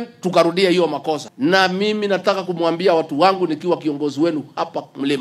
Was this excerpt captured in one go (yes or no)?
no